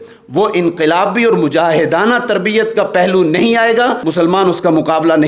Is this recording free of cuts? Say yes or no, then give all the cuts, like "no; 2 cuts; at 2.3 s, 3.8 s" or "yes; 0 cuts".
no; 1 cut; at 4.0 s